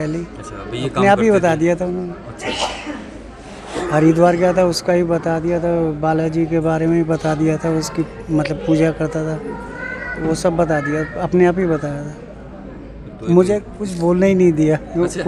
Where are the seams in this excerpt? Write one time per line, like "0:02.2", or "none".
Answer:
none